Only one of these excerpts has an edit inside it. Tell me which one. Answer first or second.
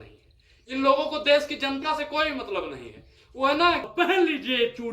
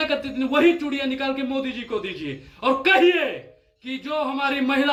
first